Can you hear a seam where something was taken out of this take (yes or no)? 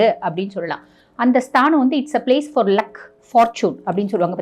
yes